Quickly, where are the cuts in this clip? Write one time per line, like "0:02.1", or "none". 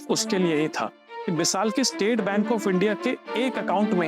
0:01.1